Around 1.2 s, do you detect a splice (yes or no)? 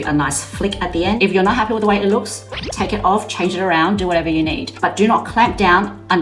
yes